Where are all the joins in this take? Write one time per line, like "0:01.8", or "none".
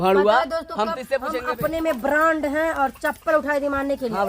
0:01.3